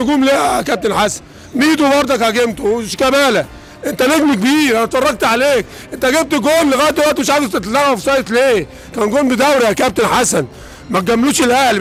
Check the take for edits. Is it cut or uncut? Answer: uncut